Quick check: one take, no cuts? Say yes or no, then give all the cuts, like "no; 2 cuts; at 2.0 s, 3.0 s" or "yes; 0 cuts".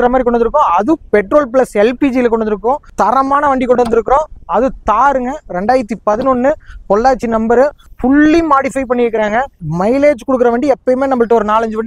no; 3 cuts; at 2.8 s, 7.8 s, 9.6 s